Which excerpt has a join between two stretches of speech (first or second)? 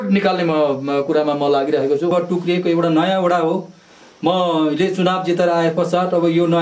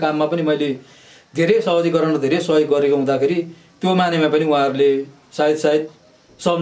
first